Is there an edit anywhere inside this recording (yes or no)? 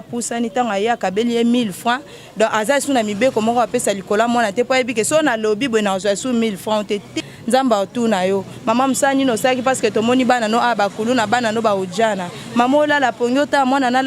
yes